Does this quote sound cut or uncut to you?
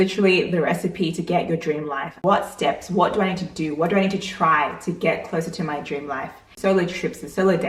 cut